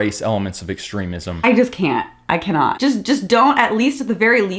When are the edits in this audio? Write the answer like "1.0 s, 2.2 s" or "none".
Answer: 1.2 s, 2.8 s

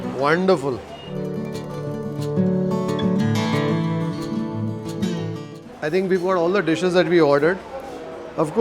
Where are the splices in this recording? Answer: 5.6 s

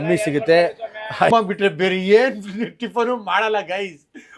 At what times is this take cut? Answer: 1.3 s

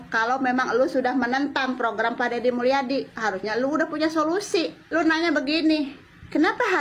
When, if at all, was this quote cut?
4.8 s

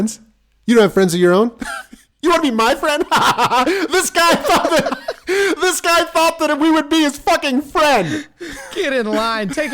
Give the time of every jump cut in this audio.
8.1 s

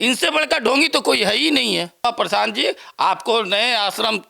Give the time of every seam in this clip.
2.0 s

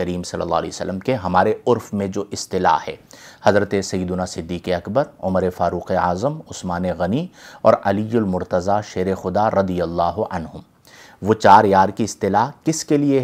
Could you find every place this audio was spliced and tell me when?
none

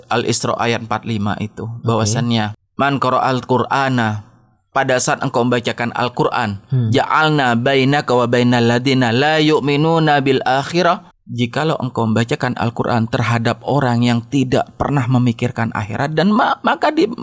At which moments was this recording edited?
2.6 s, 11.2 s

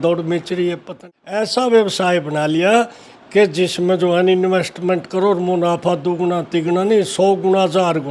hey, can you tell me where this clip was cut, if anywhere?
1.4 s

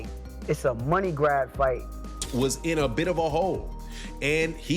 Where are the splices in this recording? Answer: 2.2 s

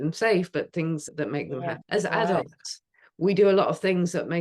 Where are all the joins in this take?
1.8 s

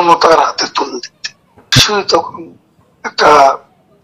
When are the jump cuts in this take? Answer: 1.8 s

